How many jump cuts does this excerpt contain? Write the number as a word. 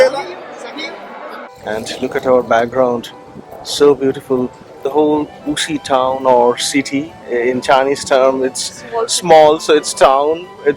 one